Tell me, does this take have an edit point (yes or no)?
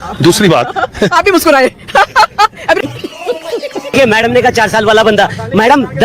yes